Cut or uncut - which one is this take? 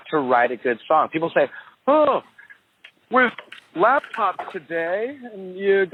uncut